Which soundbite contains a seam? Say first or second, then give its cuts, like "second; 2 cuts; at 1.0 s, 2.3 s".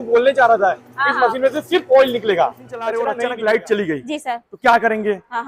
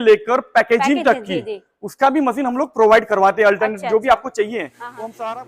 first; 1 cut; at 3.0 s